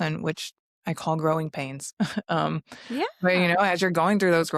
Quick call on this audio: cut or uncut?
uncut